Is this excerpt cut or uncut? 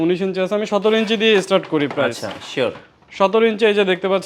uncut